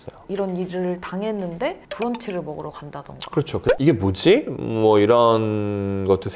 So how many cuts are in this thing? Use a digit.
1